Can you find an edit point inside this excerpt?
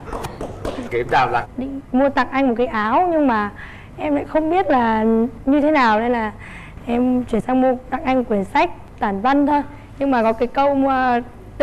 yes; 1 cut; at 1.5 s

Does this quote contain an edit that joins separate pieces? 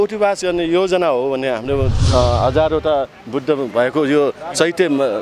yes; 1 cut; at 2.0 s

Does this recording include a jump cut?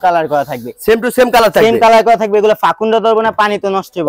no; 0 cuts

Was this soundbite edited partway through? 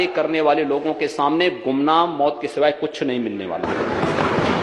no; 0 cuts

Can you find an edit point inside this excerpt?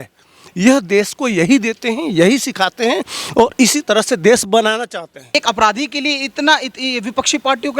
yes; 1 cut; at 5.3 s

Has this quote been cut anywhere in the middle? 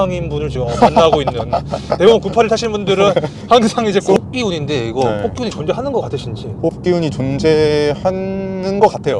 yes; 1 cut; at 4.2 s

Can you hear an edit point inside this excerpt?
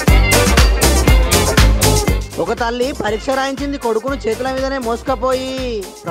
yes; 1 cut; at 1.2 s

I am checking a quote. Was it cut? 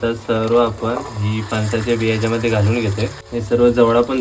yes; 1 cut; at 3.2 s

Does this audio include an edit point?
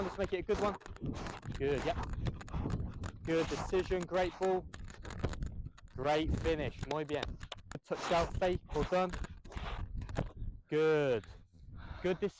yes; 1 cut; at 7.8 s

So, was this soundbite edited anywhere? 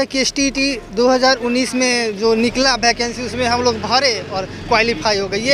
no; 0 cuts

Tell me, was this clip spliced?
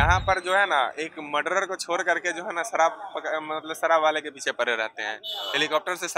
no; 0 cuts

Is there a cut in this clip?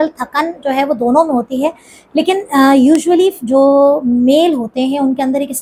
no; 0 cuts

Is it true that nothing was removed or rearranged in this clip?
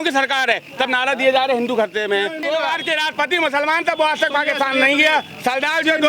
no; 1 cut; at 2.4 s

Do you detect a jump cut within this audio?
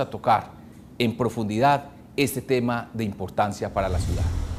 no; 0 cuts

